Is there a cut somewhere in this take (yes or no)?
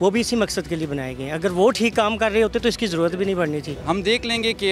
yes